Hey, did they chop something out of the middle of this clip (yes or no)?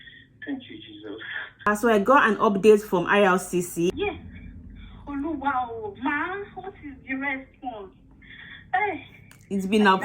yes